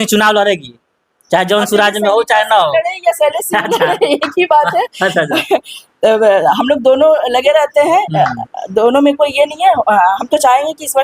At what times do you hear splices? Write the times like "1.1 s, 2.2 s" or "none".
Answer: none

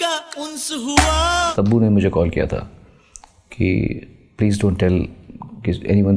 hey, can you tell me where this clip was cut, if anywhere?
1.5 s

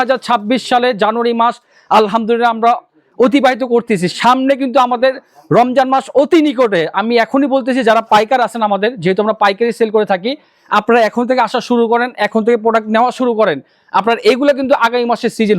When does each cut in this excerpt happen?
none

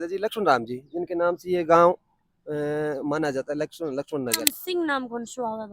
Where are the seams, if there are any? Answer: 4.5 s

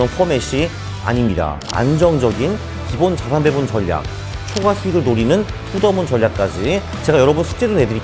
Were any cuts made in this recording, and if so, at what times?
1.6 s, 6.9 s

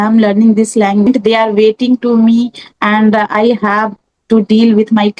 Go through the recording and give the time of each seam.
1.0 s

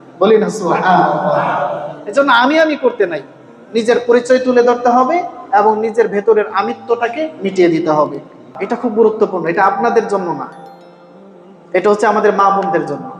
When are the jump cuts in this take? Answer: 8.5 s

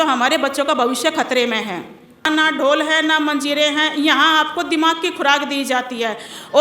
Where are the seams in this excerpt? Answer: 2.3 s

